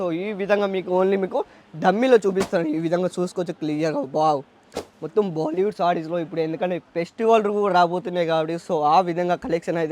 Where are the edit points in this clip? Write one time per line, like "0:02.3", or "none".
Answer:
none